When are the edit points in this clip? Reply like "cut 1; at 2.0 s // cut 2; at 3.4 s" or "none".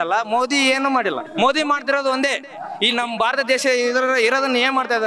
cut 1; at 1.2 s